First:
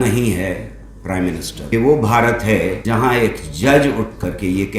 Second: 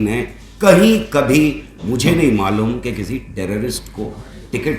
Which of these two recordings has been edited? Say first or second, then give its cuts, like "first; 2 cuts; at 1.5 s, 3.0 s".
first; 2 cuts; at 1.7 s, 2.8 s